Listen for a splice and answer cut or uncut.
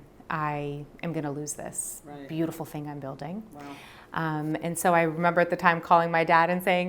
uncut